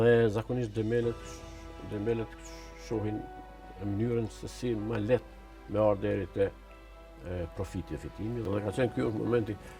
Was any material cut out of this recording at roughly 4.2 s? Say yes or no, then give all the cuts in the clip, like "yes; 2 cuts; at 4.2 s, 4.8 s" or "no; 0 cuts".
no; 1 cut; at 8.4 s